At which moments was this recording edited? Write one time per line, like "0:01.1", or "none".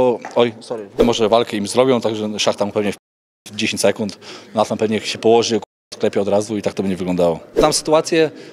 0:01.0
0:07.6